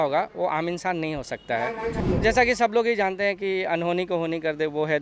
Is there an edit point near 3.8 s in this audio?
no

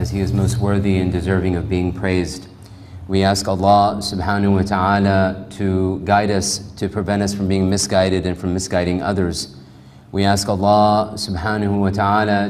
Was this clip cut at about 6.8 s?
no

